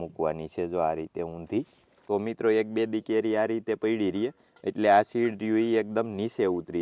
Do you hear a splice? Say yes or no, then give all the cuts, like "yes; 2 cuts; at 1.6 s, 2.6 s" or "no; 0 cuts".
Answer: no; 0 cuts